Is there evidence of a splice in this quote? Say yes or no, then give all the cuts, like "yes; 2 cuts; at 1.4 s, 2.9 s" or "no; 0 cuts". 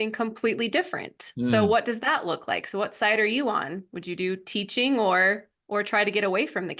no; 0 cuts